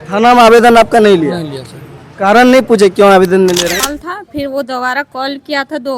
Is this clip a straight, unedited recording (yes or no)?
no